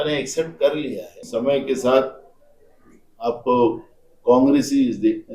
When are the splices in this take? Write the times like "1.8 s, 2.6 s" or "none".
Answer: 1.1 s